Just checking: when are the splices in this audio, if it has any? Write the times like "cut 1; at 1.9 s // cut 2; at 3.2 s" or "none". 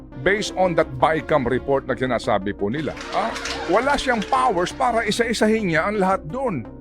cut 1; at 3.0 s